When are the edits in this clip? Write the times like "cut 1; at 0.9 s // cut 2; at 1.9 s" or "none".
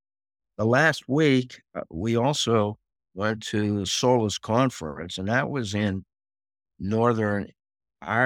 none